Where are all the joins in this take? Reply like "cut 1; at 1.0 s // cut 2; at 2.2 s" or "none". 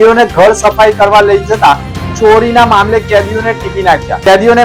none